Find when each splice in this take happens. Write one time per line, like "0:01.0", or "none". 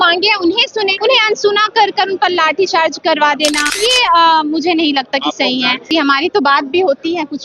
0:01.0
0:03.7